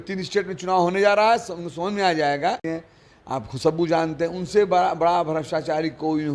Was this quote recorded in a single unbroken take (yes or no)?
no